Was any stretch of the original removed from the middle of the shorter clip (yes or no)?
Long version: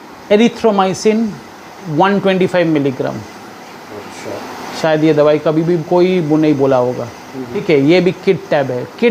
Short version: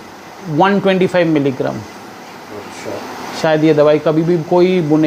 no